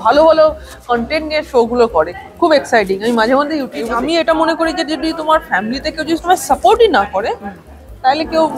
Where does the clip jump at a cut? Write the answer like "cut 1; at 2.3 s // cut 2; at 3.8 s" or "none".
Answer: cut 1; at 3.8 s